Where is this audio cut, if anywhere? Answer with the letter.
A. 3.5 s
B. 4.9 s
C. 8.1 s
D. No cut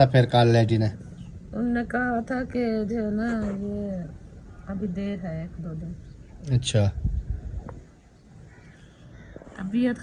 D